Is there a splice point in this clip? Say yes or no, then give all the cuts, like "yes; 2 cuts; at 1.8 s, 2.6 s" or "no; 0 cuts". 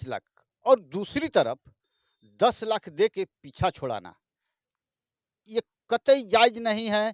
no; 0 cuts